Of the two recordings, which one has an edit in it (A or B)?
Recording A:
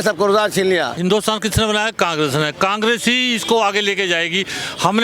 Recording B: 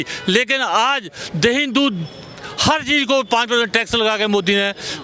A